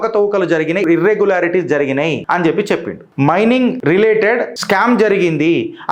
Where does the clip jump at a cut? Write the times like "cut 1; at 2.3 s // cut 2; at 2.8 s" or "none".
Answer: cut 1; at 0.8 s // cut 2; at 2.2 s // cut 3; at 3.0 s // cut 4; at 3.8 s // cut 5; at 4.5 s